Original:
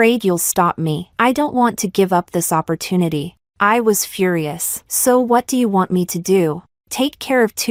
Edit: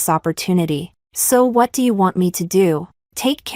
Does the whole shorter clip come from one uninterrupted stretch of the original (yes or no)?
no